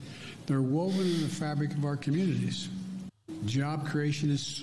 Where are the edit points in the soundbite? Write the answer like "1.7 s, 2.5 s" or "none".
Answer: 3.1 s